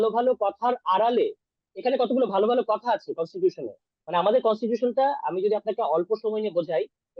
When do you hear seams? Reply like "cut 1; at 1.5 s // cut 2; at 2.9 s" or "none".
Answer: none